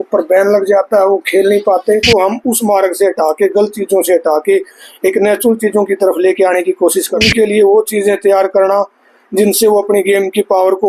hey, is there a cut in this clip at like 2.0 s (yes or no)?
yes